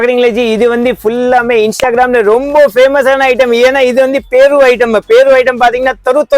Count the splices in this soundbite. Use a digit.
0